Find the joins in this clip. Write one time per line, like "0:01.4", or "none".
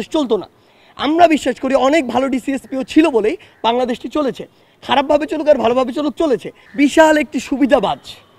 0:06.6